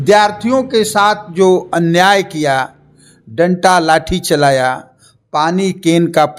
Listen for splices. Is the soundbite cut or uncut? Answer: uncut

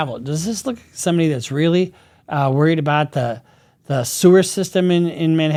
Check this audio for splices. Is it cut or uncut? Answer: uncut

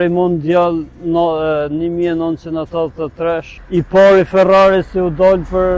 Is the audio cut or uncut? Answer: cut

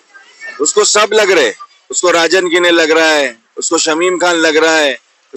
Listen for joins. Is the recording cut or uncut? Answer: uncut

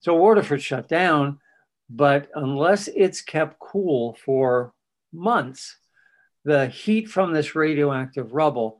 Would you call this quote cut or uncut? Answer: uncut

